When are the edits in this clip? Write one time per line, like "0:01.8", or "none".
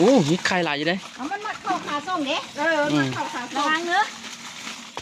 none

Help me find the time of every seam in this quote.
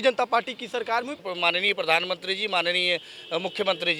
0:01.3

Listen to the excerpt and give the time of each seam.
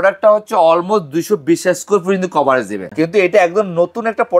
0:02.8

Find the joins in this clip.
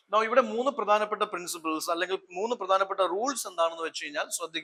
none

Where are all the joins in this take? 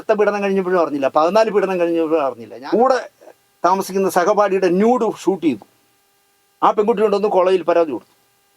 0:02.5

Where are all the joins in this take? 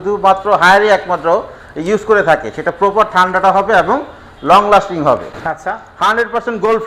none

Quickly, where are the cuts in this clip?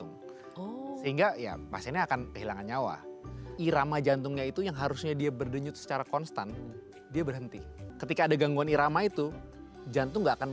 0:03.4
0:07.9

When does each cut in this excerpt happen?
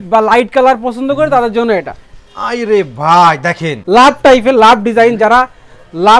0:03.7

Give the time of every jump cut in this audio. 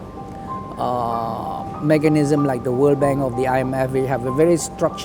none

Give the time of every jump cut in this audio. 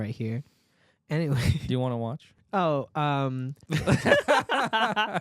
0:03.6

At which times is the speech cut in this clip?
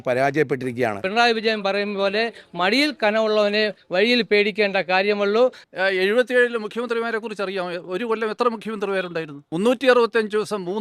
0:01.0
0:05.6
0:09.4

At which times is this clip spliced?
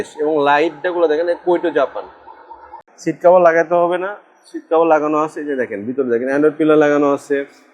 0:02.8

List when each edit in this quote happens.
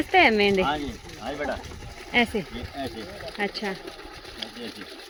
none

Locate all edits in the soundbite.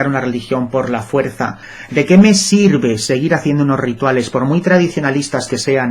0:01.7

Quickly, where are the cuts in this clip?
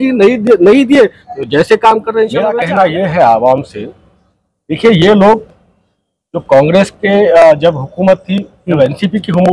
0:02.5

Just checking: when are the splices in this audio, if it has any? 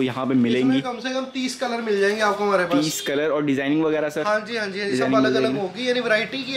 none

